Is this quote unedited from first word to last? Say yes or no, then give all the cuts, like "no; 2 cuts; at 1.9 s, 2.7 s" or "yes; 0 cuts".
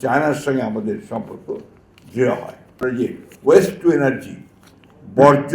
no; 1 cut; at 2.8 s